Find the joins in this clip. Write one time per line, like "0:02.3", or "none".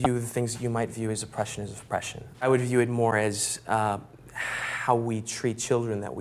0:02.2